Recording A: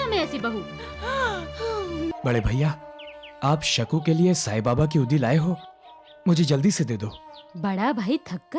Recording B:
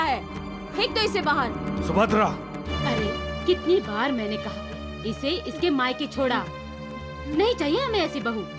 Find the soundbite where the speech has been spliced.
A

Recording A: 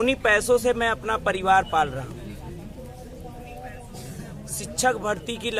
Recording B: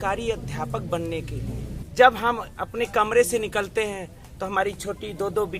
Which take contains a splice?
B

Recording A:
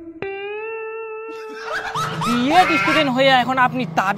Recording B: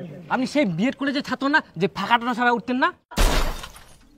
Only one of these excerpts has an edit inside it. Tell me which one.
A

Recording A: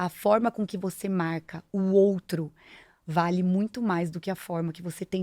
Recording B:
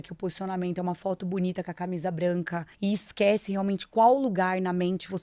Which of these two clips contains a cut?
B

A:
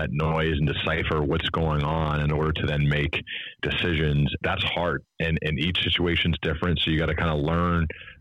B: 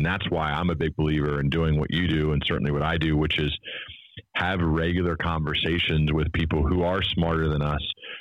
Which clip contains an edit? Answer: A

